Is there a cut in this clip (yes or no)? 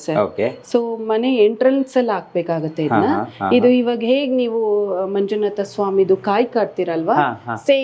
no